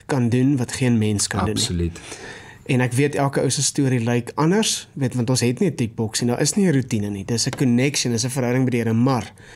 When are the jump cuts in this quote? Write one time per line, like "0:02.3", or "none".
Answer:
none